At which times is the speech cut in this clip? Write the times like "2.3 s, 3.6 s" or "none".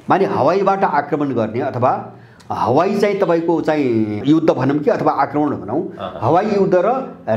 4.2 s